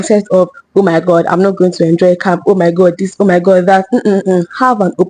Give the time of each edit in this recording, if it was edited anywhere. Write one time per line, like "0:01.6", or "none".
none